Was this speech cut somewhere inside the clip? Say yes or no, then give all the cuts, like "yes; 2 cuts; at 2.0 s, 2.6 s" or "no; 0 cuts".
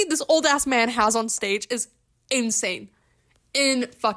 no; 0 cuts